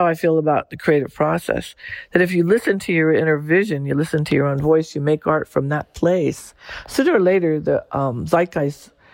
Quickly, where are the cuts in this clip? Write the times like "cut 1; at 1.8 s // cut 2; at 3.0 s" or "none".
none